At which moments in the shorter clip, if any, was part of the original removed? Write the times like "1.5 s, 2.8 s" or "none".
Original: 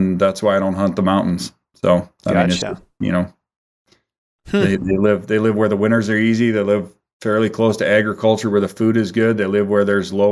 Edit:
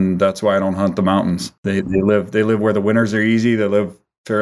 1.7 s